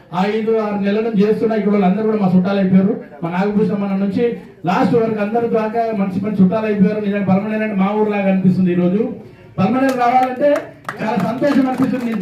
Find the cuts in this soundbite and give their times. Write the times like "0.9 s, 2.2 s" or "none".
none